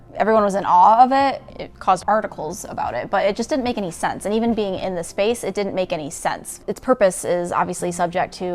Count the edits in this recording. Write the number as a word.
one